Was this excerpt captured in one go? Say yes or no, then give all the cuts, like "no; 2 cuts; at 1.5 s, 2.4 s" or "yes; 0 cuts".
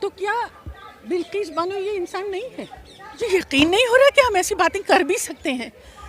no; 1 cut; at 3.2 s